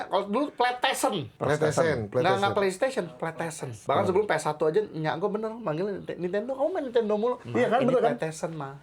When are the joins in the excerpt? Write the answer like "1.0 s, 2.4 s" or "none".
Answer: 1.3 s, 3.7 s, 7.4 s